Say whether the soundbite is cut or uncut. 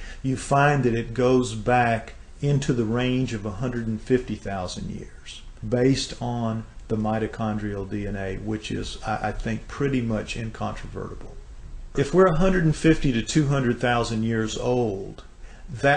cut